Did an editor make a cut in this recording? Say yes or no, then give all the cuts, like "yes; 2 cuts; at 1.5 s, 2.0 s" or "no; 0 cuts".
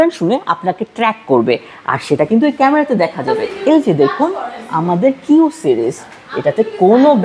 yes; 1 cut; at 3.4 s